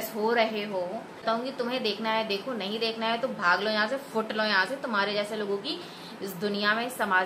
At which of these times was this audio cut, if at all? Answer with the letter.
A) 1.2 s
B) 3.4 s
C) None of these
A